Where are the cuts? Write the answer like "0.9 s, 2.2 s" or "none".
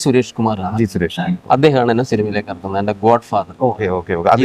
none